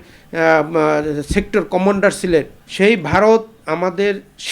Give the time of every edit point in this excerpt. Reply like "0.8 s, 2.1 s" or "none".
2.6 s